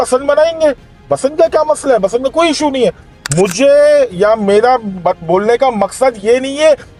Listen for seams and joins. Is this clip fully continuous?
yes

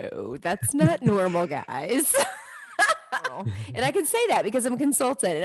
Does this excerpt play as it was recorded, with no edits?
no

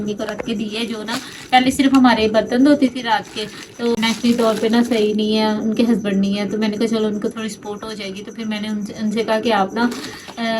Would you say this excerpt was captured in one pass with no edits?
no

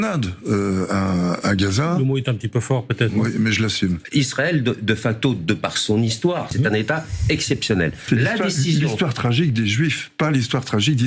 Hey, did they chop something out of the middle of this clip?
yes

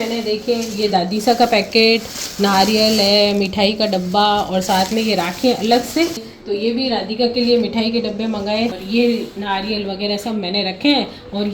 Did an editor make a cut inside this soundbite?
yes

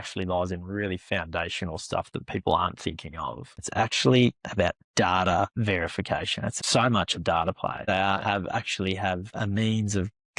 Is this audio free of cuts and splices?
no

